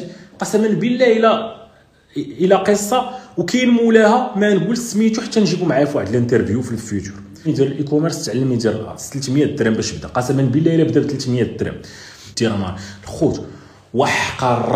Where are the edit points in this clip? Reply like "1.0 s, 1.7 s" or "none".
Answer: 7.4 s, 12.2 s